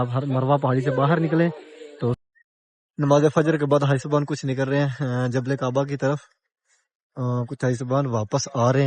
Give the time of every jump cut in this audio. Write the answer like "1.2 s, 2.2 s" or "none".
2.2 s